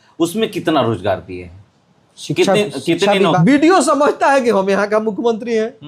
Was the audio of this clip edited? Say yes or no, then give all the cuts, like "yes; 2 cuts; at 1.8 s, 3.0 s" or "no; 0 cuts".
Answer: yes; 1 cut; at 3.4 s